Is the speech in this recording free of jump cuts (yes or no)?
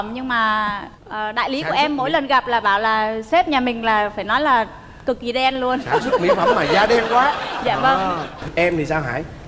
yes